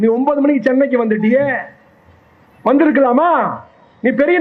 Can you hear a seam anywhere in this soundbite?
no; 0 cuts

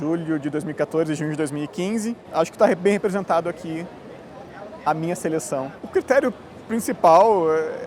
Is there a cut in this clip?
yes; 2 cuts; at 2.2 s, 5.8 s

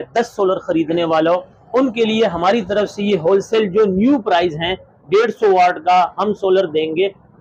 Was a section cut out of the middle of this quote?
no; 0 cuts

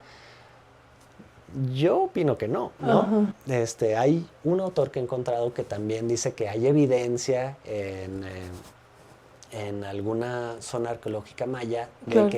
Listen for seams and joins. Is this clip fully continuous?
yes; 0 cuts

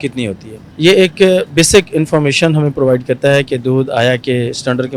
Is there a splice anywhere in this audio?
no; 0 cuts

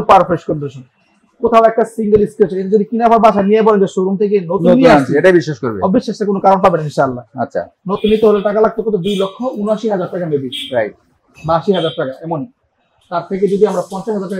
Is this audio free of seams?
yes; 0 cuts

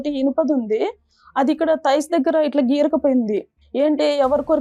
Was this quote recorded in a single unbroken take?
no; 1 cut; at 3.6 s

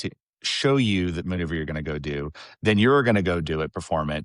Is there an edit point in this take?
no; 0 cuts

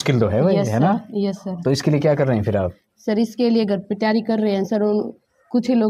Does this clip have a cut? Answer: no; 0 cuts

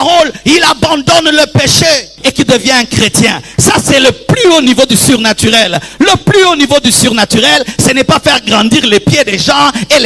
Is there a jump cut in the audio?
yes; 1 cut; at 2.1 s

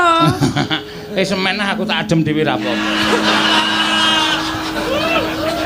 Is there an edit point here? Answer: no; 0 cuts

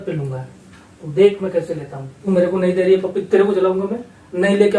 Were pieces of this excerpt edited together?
yes; 1 cut; at 2.1 s

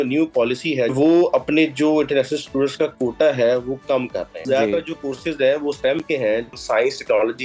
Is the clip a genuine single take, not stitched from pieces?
no; 3 cuts; at 0.9 s, 4.4 s, 6.6 s

